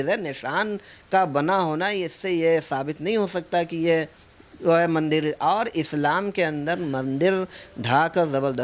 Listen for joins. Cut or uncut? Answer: uncut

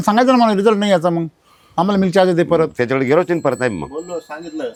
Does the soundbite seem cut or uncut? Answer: uncut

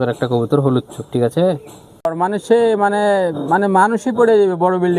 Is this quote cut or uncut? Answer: cut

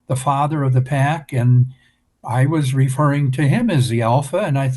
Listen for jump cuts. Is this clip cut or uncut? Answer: uncut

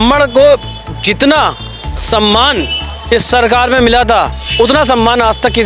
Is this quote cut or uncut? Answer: cut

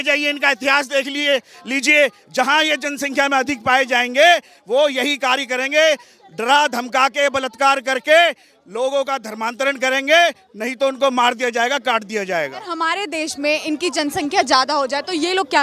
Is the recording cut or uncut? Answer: uncut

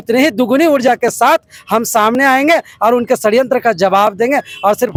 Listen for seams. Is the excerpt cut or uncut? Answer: uncut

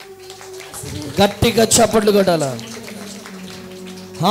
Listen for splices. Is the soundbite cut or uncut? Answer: uncut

